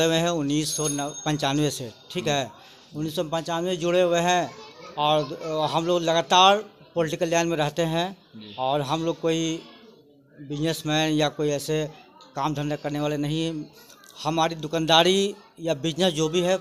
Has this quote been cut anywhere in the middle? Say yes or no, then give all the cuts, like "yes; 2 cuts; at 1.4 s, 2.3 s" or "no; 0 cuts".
no; 0 cuts